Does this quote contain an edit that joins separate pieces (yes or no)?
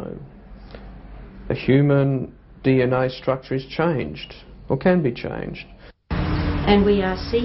yes